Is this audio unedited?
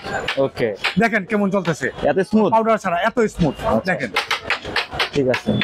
yes; 0 cuts

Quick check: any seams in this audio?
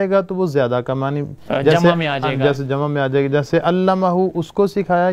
no; 0 cuts

